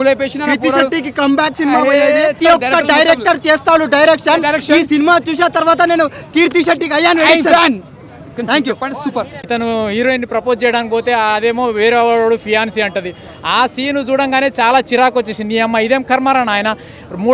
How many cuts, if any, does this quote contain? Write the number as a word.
two